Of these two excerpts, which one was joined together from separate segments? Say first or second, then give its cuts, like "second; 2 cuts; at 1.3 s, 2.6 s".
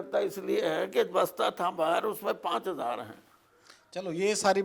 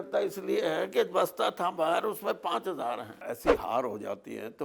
second; 1 cut; at 3.1 s